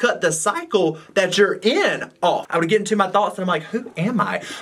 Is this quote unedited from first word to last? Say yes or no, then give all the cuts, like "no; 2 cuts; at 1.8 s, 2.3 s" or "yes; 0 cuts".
no; 1 cut; at 2.4 s